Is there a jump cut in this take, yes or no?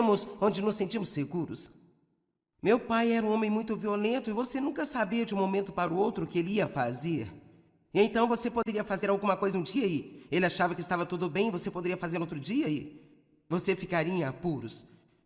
no